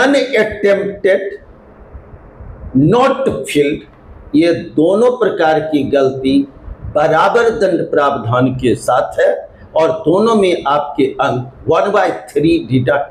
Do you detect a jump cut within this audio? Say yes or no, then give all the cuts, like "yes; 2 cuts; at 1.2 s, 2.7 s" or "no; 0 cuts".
no; 0 cuts